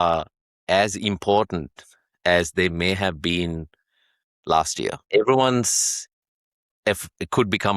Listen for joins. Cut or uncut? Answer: cut